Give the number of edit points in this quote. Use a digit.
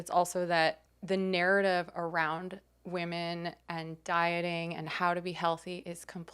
1